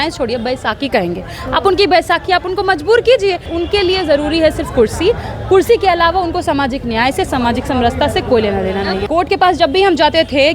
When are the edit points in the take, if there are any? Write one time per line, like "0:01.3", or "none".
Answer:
0:03.5
0:09.0